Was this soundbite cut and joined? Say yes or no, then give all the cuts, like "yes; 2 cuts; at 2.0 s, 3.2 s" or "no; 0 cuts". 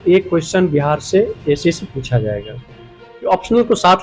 yes; 1 cut; at 3.1 s